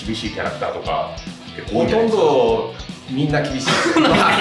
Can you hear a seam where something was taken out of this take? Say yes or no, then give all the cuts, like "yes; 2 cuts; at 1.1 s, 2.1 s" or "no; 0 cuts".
no; 0 cuts